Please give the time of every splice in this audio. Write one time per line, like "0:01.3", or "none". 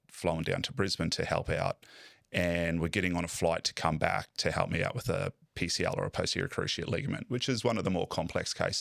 none